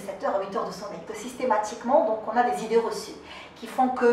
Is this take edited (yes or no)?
yes